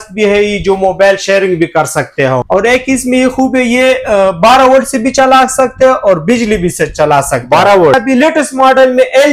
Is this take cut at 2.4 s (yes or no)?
yes